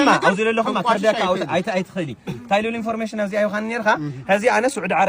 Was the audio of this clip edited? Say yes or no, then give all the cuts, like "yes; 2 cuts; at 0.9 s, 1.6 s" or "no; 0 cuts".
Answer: no; 0 cuts